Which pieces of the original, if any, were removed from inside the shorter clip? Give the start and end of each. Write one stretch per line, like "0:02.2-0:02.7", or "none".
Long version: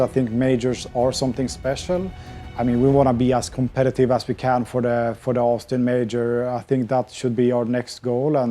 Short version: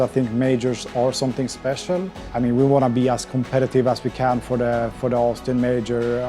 0:02.2-0:02.4